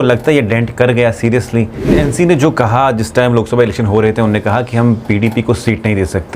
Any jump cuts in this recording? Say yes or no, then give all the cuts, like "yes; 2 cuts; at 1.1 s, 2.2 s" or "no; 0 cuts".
yes; 1 cut; at 2.1 s